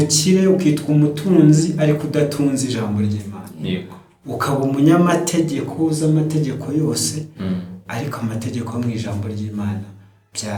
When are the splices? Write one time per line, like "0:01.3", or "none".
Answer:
none